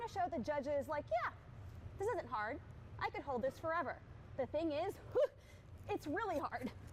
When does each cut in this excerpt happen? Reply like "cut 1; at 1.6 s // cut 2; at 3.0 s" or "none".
none